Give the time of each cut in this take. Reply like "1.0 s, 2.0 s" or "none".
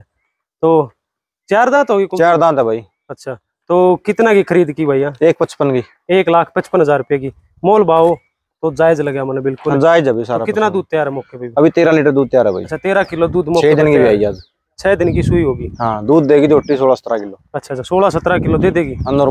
none